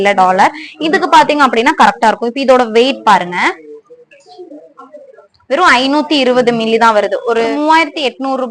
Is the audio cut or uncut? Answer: uncut